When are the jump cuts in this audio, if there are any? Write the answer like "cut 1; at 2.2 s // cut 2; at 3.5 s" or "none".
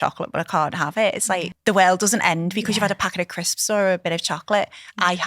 cut 1; at 1.5 s